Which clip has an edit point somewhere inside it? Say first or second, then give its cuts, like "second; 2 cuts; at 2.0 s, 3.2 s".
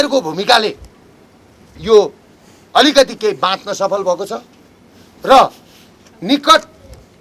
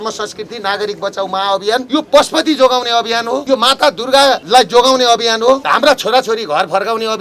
second; 4 cuts; at 1.9 s, 3.4 s, 4.4 s, 5.6 s